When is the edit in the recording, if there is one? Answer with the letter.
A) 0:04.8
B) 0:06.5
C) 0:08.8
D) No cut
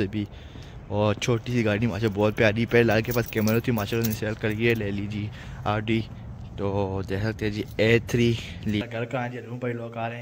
C